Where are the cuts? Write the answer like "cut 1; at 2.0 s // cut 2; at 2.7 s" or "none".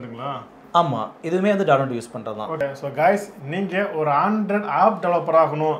cut 1; at 2.6 s